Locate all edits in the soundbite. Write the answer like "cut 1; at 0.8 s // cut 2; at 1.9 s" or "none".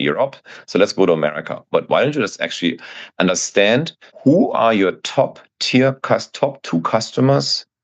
none